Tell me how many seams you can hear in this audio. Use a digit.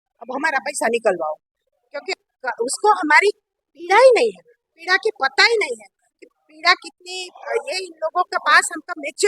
1